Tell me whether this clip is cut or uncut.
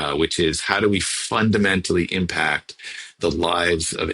uncut